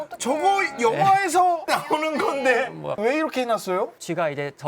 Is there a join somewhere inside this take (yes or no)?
yes